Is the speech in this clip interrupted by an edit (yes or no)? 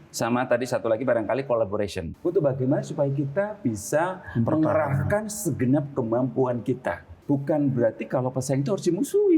yes